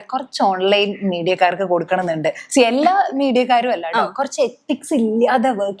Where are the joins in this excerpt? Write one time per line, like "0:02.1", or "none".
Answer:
none